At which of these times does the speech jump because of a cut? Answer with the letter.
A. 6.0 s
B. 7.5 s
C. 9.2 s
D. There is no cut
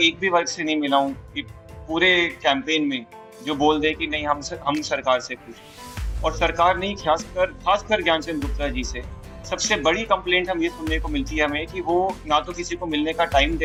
D